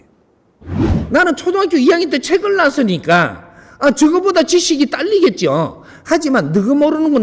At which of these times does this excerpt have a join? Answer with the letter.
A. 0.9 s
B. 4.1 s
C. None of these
A